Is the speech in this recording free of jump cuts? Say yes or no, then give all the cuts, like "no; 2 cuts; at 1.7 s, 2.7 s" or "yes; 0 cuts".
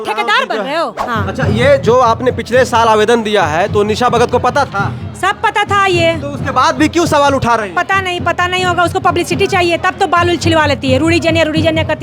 no; 1 cut; at 1.0 s